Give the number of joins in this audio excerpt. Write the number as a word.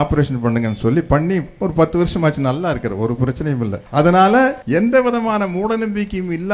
two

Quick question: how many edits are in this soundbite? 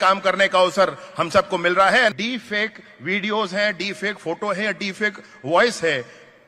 one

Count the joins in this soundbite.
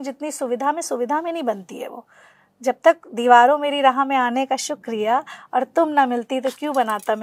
zero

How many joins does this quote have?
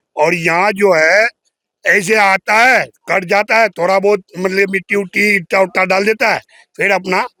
zero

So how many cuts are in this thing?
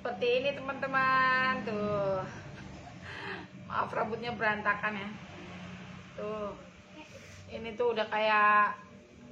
zero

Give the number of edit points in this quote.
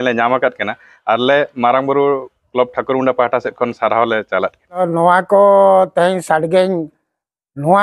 one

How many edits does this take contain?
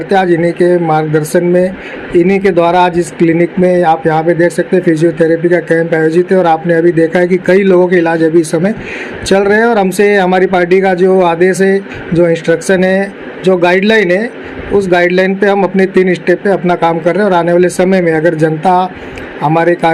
zero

